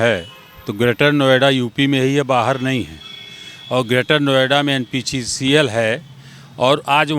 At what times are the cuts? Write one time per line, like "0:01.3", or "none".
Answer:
none